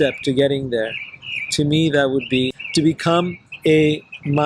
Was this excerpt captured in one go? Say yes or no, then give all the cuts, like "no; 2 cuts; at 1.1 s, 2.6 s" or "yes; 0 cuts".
no; 1 cut; at 2.6 s